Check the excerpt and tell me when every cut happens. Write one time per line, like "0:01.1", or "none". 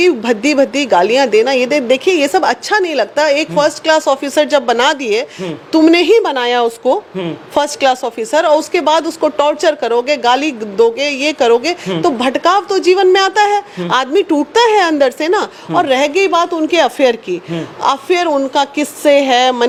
none

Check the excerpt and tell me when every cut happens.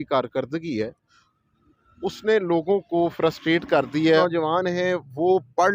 0:04.2

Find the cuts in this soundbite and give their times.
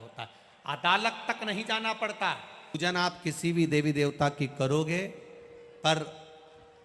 0:02.8

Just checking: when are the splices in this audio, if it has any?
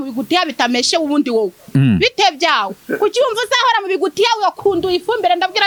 none

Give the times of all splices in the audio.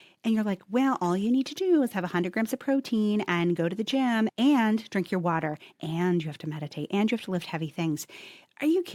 none

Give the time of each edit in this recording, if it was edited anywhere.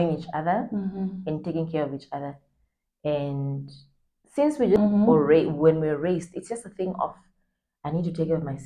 none

